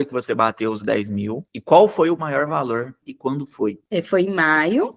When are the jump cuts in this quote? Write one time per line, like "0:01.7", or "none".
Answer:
0:01.5
0:03.0